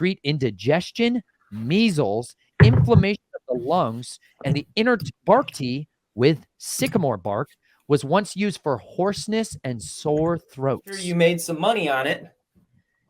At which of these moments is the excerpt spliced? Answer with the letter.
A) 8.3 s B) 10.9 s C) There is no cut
B